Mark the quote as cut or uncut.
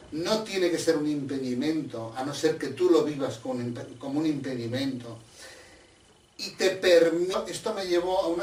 uncut